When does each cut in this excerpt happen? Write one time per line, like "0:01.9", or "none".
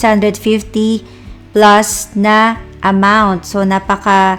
none